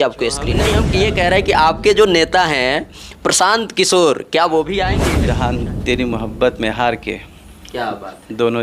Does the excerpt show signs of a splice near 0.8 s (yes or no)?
yes